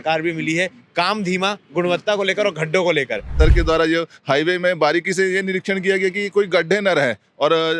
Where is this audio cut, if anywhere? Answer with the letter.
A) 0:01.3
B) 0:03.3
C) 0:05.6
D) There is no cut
B